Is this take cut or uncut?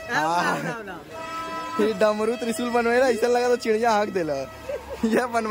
uncut